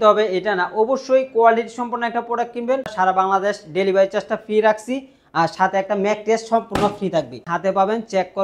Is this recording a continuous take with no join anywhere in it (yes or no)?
no